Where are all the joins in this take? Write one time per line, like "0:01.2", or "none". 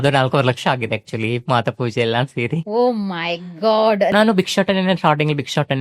0:04.1